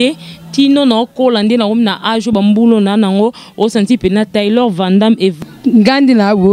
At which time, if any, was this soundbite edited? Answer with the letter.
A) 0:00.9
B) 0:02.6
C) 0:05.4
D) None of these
C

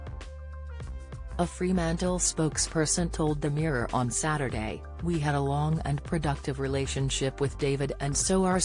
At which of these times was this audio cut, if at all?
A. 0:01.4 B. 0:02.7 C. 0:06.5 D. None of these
A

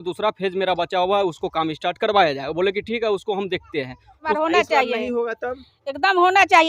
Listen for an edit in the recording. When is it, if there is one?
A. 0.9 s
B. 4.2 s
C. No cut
B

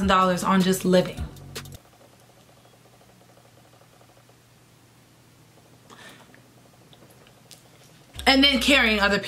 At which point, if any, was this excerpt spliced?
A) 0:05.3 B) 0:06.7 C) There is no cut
C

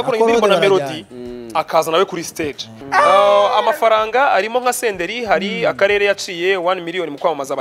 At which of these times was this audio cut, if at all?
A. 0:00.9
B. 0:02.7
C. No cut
B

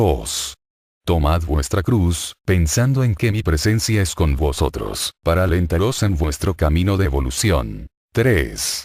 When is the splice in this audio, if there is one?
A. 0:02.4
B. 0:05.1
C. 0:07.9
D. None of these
D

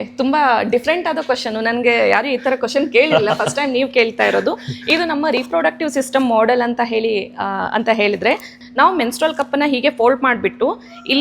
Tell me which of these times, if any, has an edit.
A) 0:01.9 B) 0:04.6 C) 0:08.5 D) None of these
C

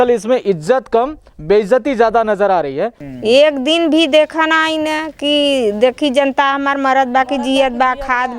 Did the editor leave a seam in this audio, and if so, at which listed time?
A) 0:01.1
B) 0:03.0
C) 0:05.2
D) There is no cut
B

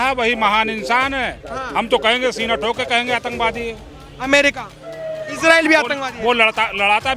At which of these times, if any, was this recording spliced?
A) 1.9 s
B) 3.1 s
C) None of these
C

